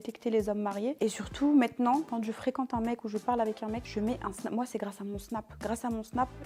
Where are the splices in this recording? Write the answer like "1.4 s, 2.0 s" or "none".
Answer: none